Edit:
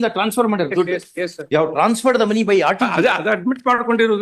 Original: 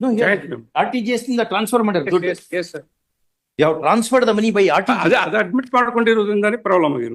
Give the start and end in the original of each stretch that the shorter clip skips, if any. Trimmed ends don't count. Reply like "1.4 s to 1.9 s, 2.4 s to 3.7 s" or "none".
2.7 s to 3.4 s